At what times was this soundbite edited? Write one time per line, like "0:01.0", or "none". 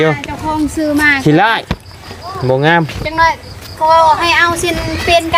none